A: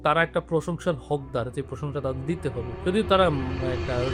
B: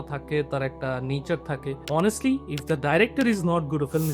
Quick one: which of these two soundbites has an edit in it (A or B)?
B